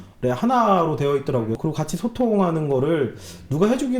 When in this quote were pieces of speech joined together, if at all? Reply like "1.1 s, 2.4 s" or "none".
1.6 s